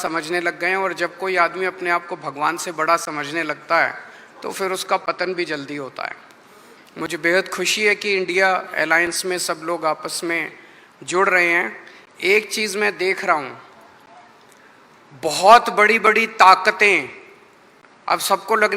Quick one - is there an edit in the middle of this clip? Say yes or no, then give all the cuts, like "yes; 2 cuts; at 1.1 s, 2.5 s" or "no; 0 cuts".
no; 0 cuts